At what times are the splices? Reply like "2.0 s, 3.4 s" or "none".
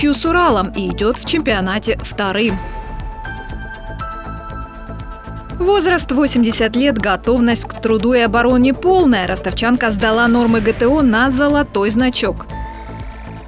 3.2 s, 5.6 s, 12.6 s